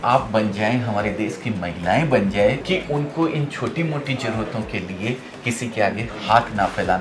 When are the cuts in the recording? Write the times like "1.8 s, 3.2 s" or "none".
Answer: none